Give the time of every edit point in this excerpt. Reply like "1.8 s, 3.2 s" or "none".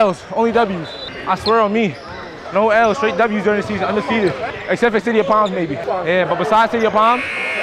0.9 s, 4.5 s, 5.8 s

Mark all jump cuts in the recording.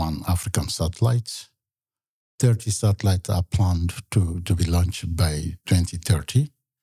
5.6 s

